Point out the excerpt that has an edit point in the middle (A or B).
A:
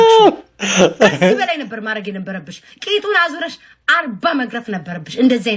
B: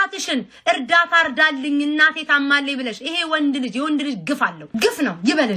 B